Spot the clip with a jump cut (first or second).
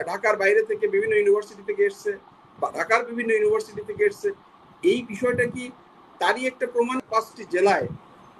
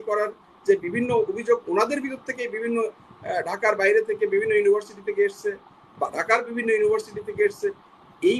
first